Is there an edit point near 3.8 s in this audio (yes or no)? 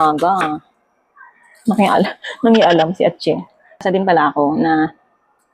yes